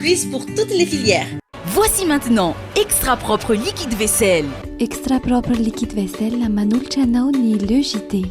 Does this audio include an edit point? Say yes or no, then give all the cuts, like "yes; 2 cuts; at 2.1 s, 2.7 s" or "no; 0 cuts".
yes; 1 cut; at 1.6 s